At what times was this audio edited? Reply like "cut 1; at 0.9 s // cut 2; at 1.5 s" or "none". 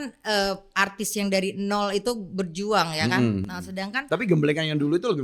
none